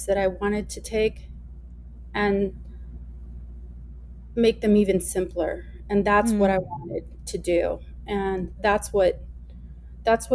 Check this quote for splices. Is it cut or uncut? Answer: uncut